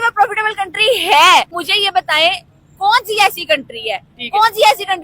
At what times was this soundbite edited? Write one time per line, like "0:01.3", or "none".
0:01.5